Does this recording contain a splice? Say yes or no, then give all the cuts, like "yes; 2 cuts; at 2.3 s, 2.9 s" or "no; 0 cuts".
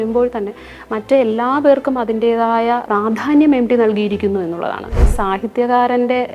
yes; 2 cuts; at 2.9 s, 5.0 s